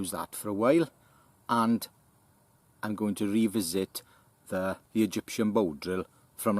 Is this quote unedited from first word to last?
no; 1 cut; at 4.8 s

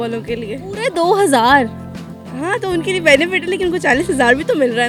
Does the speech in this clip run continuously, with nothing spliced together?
yes; 0 cuts

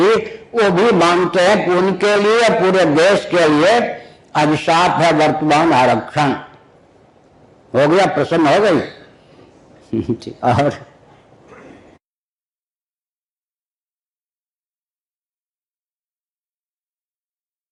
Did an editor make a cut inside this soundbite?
no; 0 cuts

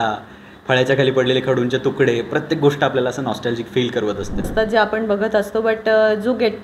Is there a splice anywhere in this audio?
yes; 1 cut; at 4.5 s

